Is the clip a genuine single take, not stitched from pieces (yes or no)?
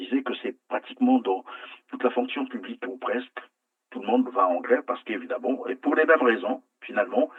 yes